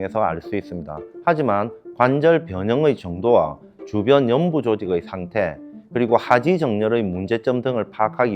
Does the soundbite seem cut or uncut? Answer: uncut